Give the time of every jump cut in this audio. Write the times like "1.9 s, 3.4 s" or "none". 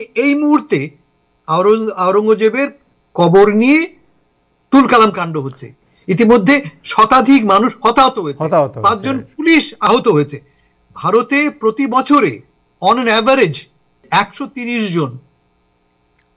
9.8 s, 14.0 s